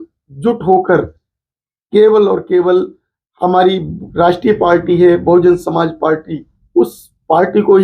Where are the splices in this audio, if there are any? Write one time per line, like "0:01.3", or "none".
0:04.0